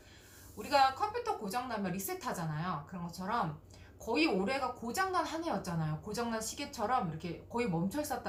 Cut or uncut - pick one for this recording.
uncut